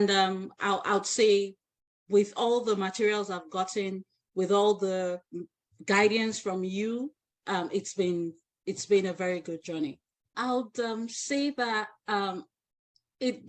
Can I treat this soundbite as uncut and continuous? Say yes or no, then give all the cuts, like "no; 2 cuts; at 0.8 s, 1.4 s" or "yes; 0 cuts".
no; 1 cut; at 10.3 s